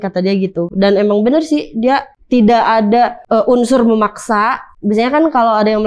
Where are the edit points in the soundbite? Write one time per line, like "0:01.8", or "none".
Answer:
0:02.1
0:03.2
0:04.7